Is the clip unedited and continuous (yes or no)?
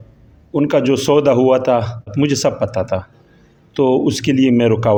yes